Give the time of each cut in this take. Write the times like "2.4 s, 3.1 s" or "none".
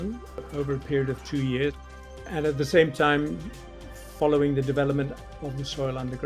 2.0 s, 5.3 s